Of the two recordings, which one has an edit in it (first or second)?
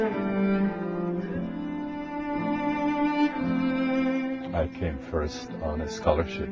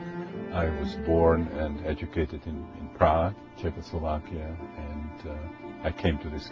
first